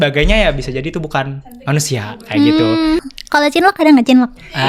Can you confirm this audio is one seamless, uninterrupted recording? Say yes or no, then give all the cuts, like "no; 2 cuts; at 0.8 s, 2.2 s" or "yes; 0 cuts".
no; 1 cut; at 3.0 s